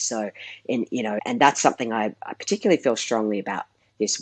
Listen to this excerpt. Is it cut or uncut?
cut